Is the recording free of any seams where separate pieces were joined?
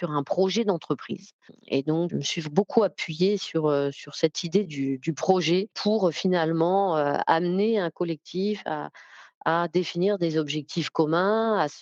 yes; 0 cuts

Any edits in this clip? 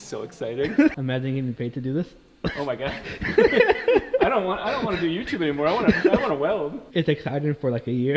yes; 1 cut; at 0.9 s

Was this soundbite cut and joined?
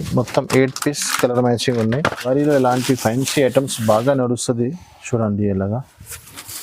yes; 1 cut; at 2.3 s

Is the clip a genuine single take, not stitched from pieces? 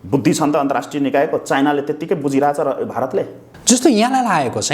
yes; 0 cuts

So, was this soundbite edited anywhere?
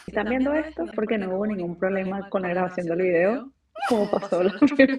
yes; 1 cut; at 0.9 s

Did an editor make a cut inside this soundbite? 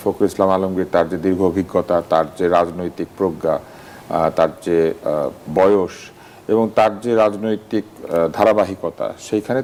no; 0 cuts

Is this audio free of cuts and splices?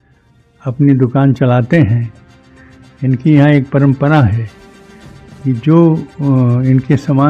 yes; 0 cuts

